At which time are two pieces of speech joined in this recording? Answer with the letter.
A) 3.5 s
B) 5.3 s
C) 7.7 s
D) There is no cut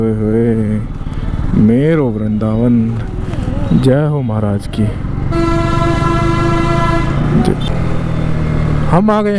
C